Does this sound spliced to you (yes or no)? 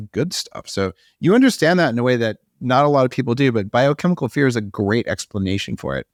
no